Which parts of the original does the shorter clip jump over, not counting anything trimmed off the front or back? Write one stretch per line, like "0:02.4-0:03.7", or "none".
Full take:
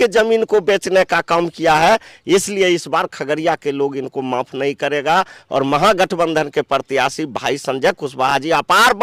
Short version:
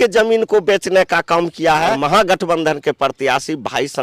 0:01.9-0:05.7